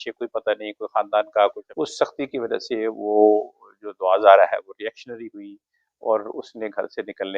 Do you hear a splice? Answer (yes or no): yes